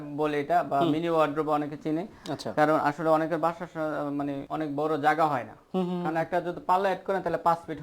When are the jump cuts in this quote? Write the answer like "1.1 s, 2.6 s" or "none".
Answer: none